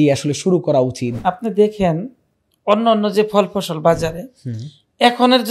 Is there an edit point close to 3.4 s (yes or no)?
no